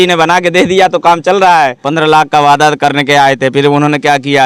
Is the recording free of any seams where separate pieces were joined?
no; 1 cut; at 1.8 s

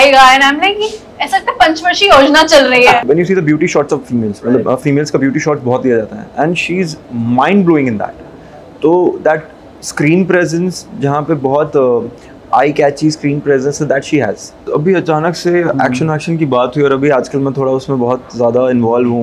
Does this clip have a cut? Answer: yes; 2 cuts; at 3.0 s, 14.7 s

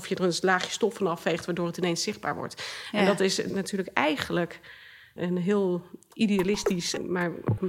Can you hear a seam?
yes; 3 cuts; at 3.5 s, 5.2 s, 6.9 s

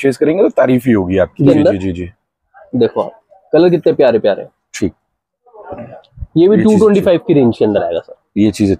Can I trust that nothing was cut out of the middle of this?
no; 1 cut; at 1.5 s

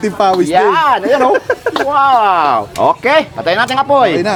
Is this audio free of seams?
yes; 0 cuts

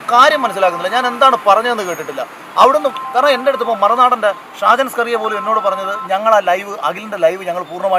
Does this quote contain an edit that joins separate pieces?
no; 0 cuts

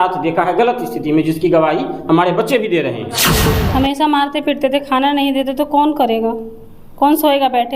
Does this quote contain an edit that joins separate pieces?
yes; 1 cut; at 3.3 s

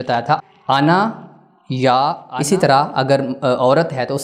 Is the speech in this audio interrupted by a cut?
yes; 1 cut; at 2.2 s

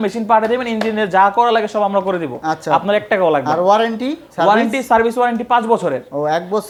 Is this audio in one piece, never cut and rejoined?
yes; 0 cuts

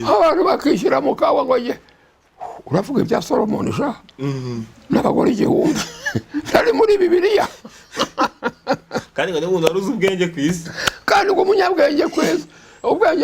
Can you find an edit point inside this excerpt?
no; 0 cuts

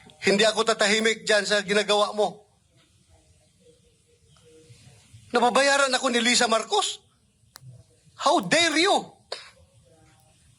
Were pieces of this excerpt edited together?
no; 0 cuts

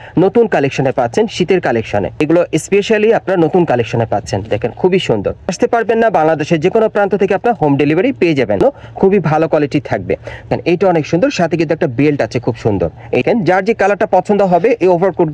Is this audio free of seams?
no; 5 cuts; at 2.2 s, 5.5 s, 8.6 s, 10.5 s, 13.2 s

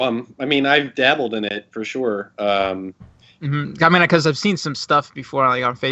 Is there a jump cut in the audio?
yes; 1 cut; at 1.0 s

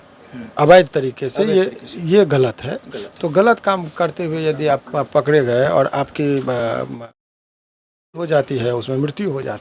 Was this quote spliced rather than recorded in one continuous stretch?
no; 0 cuts

